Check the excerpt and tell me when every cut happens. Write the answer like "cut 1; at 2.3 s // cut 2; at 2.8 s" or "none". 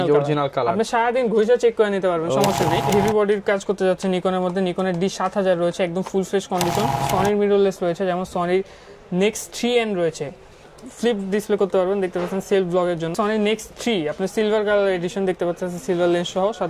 cut 1; at 2.8 s // cut 2; at 7.0 s // cut 3; at 10.6 s // cut 4; at 13.1 s